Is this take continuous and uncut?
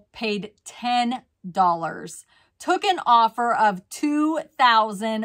yes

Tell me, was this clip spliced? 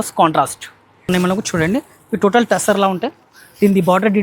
yes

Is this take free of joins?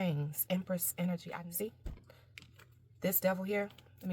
no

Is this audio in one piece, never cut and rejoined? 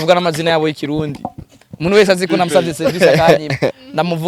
yes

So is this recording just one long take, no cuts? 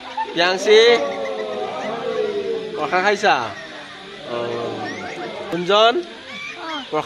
no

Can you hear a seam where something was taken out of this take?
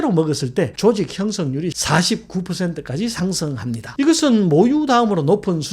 yes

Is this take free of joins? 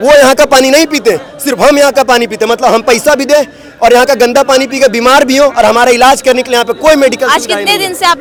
yes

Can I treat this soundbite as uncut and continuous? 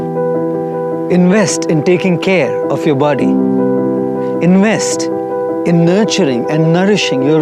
yes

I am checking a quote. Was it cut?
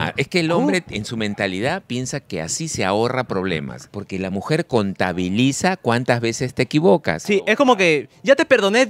yes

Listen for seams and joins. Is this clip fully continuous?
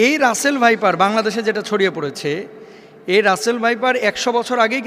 yes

